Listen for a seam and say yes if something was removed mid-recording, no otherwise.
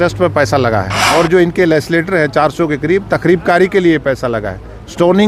yes